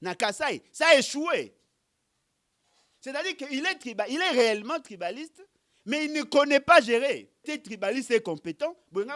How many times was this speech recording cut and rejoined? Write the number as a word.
zero